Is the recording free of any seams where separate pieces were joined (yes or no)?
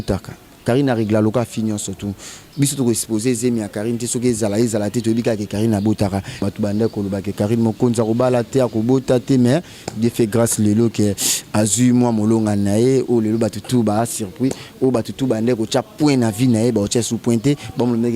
no